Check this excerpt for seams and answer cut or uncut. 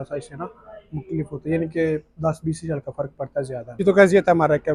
uncut